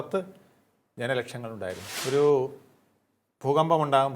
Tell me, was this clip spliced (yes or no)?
yes